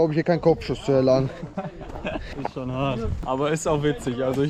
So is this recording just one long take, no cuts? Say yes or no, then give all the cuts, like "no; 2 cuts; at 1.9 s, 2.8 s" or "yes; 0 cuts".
yes; 0 cuts